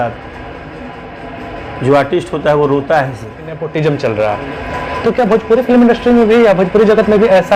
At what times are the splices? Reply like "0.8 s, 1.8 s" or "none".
3.6 s